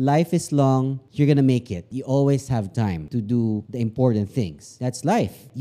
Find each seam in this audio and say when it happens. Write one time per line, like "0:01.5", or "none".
0:04.7